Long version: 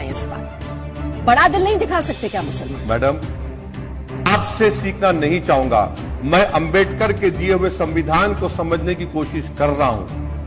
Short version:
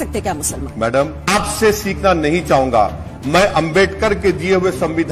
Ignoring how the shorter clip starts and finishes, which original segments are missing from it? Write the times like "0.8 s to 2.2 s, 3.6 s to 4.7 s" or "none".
3.3 s to 4.2 s

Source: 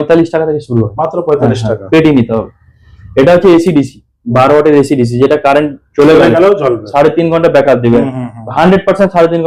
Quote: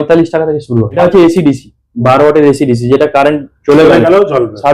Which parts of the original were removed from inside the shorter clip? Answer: 1.0 s to 3.3 s

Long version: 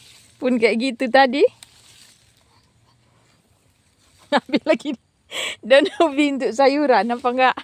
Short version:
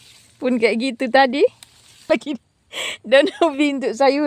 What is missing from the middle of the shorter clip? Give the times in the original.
2.0 s to 4.6 s

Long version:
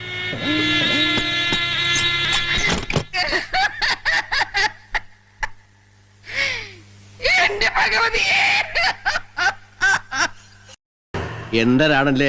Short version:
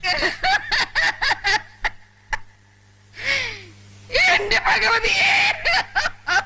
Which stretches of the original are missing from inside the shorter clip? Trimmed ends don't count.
none

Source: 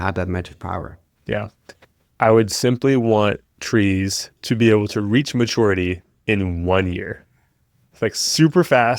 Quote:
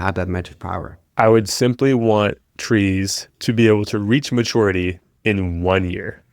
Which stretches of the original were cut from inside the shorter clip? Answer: 1.0 s to 2.0 s

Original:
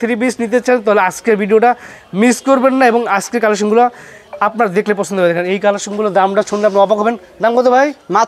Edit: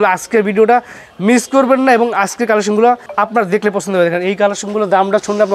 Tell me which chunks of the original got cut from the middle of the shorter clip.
4.0 s to 4.3 s

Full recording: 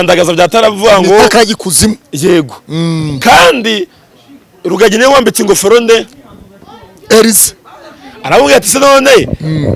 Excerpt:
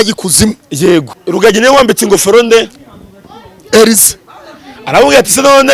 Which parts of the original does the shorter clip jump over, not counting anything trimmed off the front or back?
2.6 s to 4.5 s

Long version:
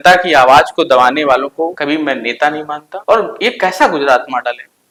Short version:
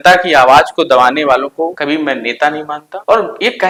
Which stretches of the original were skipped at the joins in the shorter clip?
none

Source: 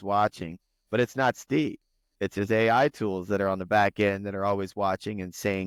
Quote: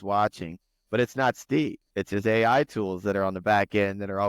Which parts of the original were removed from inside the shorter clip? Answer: 1.8 s to 2.1 s

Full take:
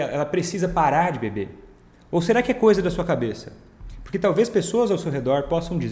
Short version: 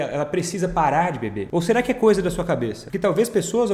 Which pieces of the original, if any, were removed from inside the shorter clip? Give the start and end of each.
1.4 s to 2.0 s, 3.4 s to 4.0 s

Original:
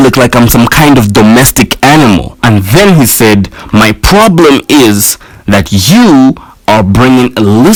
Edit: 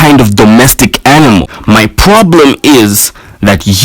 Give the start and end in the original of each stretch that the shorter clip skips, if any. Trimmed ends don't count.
2.3 s to 3.6 s

